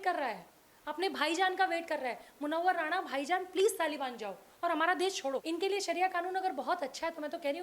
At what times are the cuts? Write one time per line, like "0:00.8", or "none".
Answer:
0:05.4